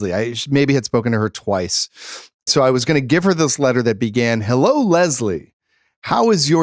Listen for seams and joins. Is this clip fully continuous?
no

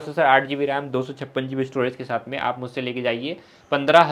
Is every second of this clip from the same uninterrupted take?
yes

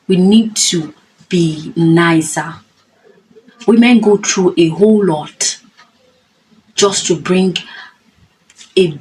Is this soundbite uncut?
yes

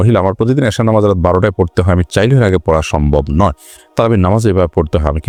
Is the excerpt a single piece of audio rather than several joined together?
yes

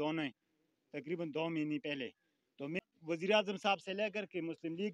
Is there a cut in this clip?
yes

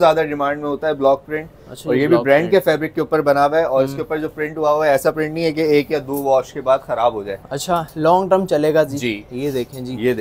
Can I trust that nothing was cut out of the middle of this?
yes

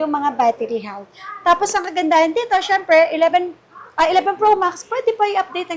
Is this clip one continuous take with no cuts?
yes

